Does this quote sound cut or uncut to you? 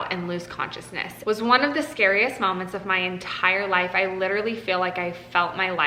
cut